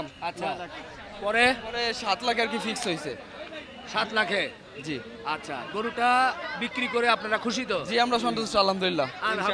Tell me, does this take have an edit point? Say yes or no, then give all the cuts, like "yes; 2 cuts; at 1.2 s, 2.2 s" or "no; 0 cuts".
no; 0 cuts